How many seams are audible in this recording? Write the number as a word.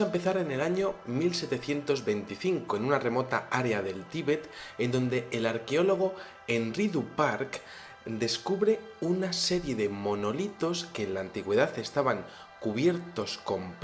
one